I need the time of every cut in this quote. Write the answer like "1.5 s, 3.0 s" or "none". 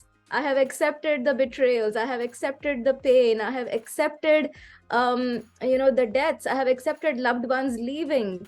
none